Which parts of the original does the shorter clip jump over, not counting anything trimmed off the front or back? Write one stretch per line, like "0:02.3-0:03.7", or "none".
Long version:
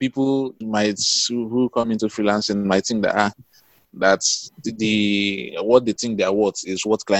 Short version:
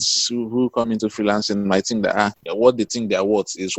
0:03.4-0:05.5